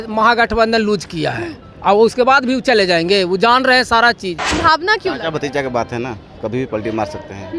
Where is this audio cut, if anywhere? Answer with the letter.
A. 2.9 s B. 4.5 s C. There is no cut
B